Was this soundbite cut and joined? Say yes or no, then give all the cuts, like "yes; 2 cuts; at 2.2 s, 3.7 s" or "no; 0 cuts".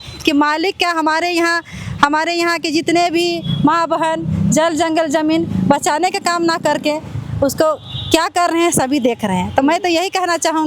no; 0 cuts